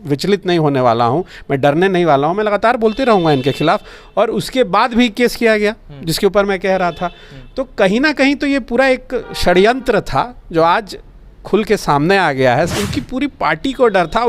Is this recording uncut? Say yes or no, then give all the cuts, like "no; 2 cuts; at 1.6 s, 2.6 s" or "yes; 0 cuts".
no; 1 cut; at 12.7 s